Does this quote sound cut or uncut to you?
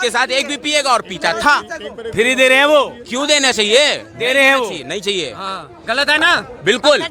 uncut